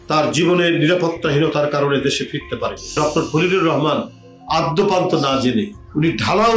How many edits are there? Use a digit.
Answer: 1